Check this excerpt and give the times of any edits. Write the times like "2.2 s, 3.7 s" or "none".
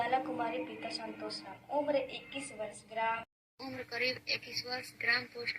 3.3 s